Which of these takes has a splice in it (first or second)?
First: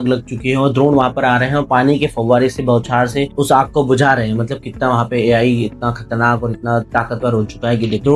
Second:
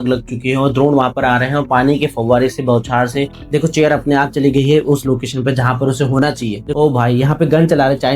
second